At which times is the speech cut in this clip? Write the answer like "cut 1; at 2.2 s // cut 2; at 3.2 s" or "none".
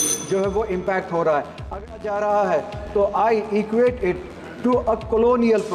cut 1; at 2.0 s